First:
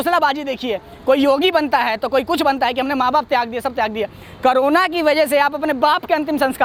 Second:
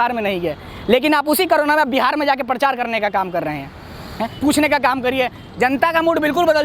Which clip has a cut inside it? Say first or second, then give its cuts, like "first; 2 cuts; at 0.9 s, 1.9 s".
second; 1 cut; at 4.2 s